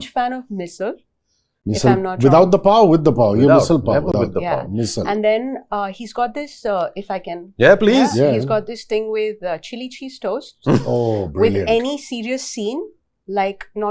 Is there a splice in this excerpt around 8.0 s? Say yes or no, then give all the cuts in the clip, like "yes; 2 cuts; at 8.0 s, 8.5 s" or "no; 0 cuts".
no; 0 cuts